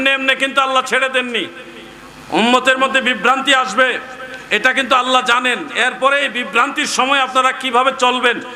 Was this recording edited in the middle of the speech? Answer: no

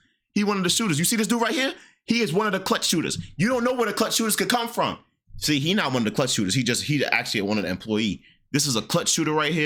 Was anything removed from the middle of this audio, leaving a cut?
no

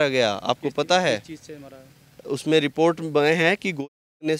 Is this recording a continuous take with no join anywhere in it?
yes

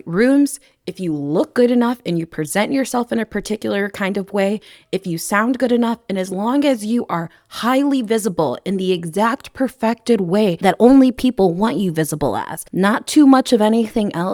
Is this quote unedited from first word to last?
yes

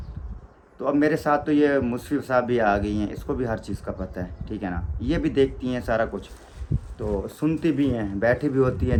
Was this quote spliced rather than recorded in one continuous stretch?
no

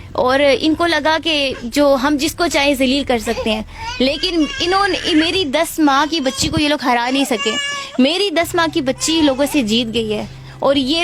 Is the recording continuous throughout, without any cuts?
yes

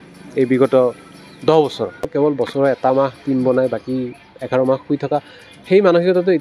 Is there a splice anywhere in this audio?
yes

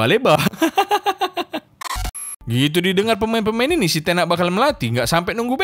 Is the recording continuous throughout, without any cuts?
no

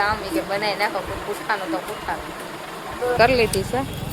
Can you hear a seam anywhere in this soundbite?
yes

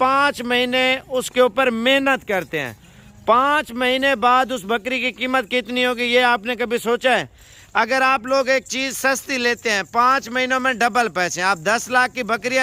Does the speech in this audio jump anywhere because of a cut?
no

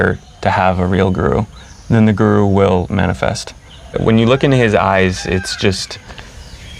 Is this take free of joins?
no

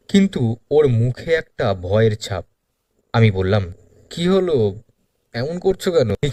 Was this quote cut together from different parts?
no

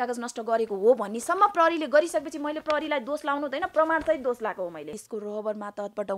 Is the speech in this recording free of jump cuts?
no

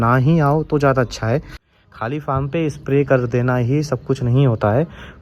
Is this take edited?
yes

